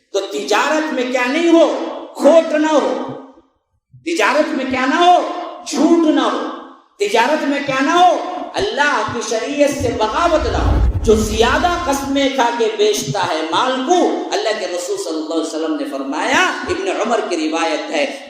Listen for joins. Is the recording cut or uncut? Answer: cut